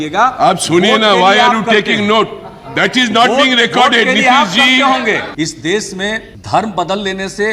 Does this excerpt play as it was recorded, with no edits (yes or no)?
no